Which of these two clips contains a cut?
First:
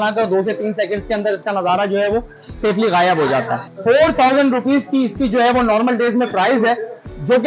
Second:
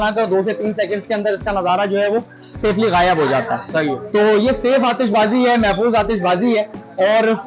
first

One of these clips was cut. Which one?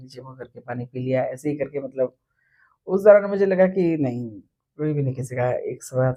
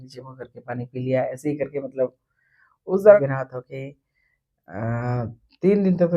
second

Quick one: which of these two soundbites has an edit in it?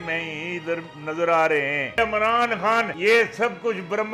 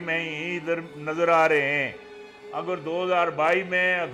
first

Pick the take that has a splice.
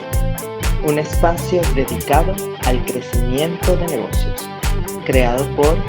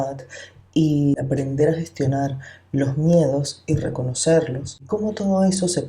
second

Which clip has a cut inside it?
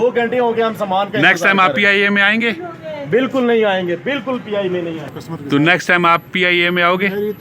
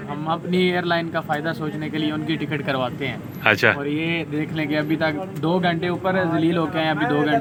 first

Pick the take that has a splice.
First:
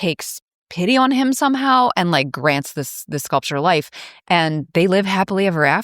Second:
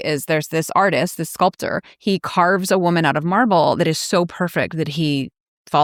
first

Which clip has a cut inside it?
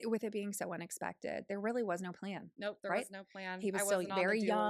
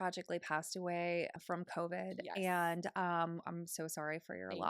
second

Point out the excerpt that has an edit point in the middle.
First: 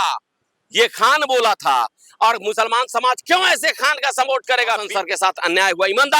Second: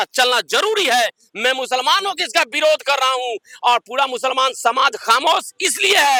first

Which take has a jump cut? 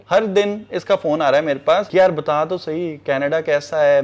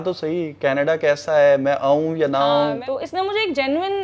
second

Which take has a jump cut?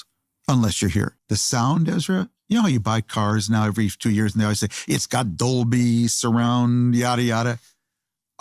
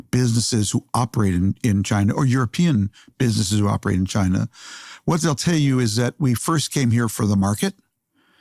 first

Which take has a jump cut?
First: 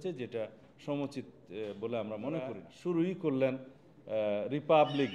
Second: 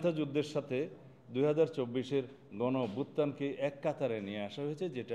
first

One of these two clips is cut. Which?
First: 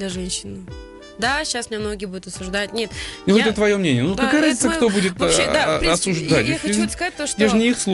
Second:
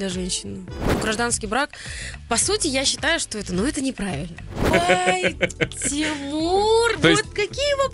second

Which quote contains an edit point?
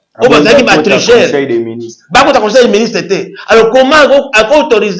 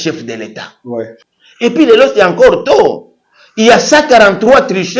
second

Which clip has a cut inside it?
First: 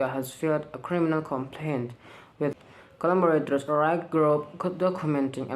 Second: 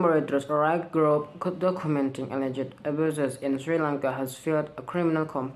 first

